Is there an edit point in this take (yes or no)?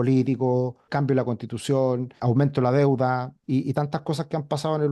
yes